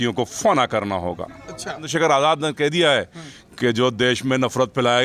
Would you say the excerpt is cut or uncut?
cut